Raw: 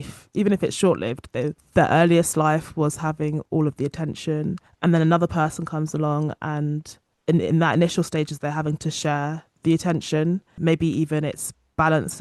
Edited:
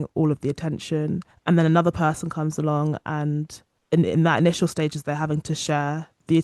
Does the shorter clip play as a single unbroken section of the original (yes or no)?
yes